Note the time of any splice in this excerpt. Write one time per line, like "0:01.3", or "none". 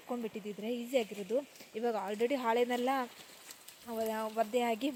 none